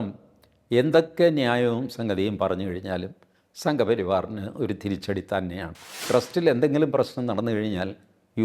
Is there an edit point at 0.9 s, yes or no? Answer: no